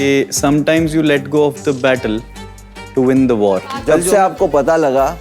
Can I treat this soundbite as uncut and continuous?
no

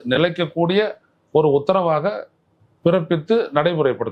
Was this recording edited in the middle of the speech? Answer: no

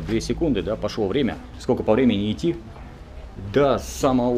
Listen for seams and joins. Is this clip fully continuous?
yes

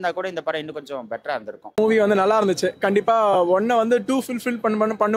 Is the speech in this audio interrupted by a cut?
yes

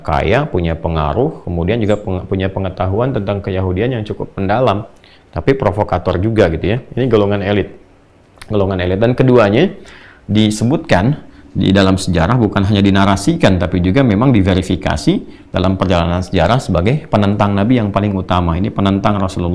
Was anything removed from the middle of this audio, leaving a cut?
no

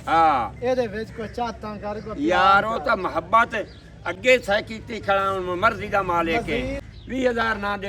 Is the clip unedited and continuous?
no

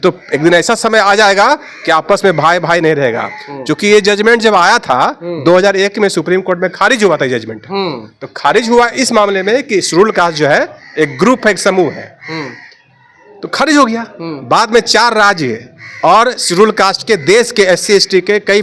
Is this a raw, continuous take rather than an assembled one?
yes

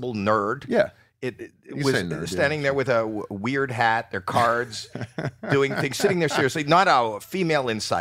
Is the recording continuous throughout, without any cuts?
yes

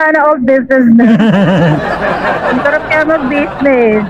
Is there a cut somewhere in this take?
no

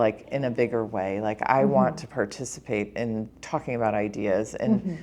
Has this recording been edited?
yes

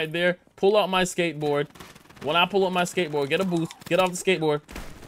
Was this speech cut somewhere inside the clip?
no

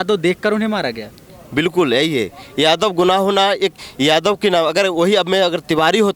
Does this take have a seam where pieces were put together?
no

